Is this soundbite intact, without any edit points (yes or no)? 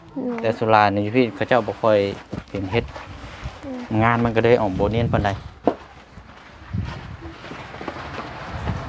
yes